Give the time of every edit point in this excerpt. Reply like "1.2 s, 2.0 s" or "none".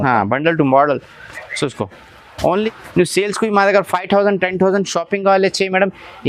2.6 s